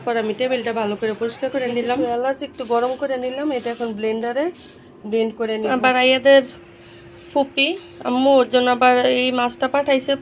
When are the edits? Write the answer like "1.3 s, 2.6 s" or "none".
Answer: 2.1 s, 5.7 s